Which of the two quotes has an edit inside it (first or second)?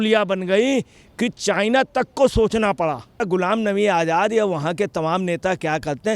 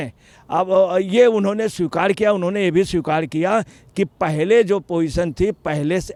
first